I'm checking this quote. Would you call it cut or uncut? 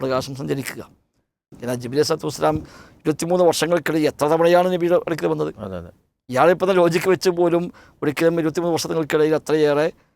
cut